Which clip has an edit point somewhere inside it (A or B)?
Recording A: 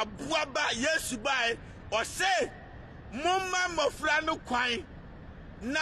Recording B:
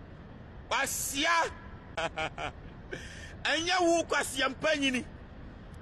B